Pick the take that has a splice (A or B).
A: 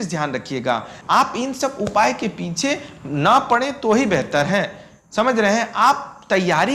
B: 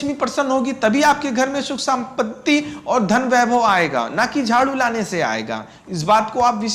A